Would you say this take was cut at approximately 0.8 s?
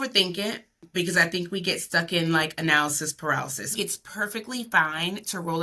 yes; 2 cuts; at 0.8 s, 3.7 s

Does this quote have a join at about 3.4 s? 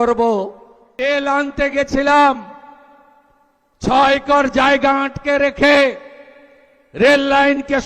no; 1 cut; at 0.9 s

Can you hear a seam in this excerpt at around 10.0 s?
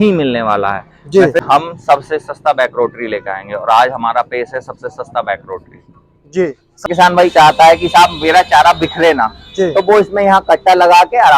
no; 2 cuts; at 1.4 s, 6.9 s

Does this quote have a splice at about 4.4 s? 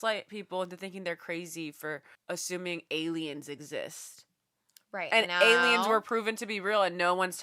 no; 1 cut; at 2.1 s

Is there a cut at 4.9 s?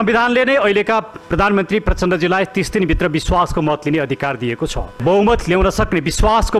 yes; 1 cut; at 4.9 s

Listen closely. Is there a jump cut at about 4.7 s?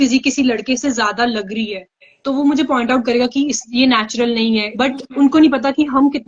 yes; 1 cut; at 4.7 s

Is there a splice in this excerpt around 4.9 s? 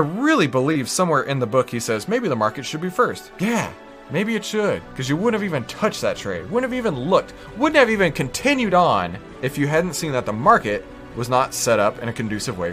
yes; 3 cuts; at 3.3 s, 4.9 s, 9.2 s

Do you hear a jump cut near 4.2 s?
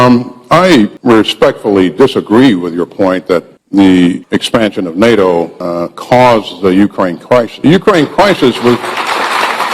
yes; 5 cuts; at 1.0 s, 3.6 s, 4.2 s, 5.6 s, 7.5 s

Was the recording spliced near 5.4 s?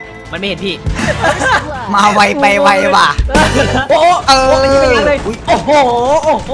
no; 1 cut; at 3.8 s

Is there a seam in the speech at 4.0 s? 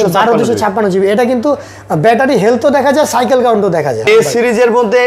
yes; 1 cut; at 4.0 s

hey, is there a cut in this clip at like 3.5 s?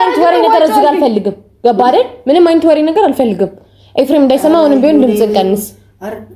no; 0 cuts

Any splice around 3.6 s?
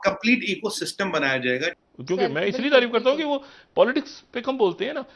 no; 1 cut; at 1.9 s

